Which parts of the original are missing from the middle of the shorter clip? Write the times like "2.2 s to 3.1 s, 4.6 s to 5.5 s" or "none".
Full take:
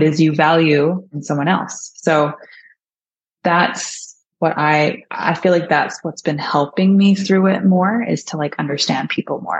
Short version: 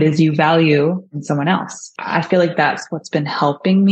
1.9 s to 5.0 s